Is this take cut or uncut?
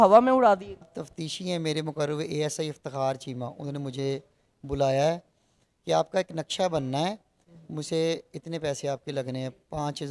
cut